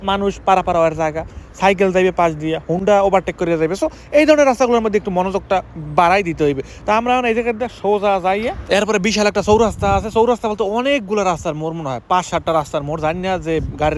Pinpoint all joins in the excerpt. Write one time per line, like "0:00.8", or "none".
none